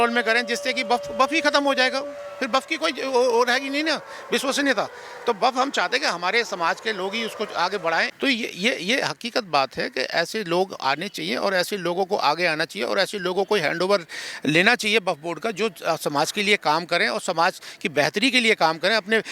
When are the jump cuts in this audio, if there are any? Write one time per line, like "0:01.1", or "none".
0:08.1